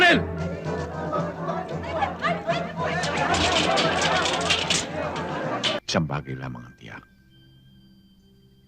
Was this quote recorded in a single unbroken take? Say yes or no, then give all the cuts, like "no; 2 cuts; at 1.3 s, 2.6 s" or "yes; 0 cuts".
no; 1 cut; at 5.8 s